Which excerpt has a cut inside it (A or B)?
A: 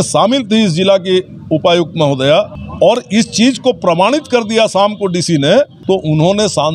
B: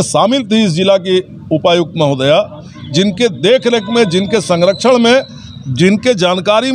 A